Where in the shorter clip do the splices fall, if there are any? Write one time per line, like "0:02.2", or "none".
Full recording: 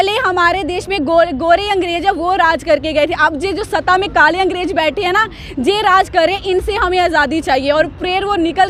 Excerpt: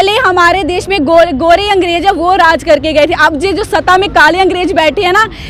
none